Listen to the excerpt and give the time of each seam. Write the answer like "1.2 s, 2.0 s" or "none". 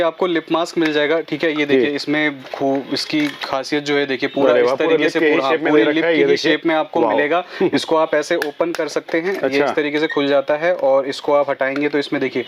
none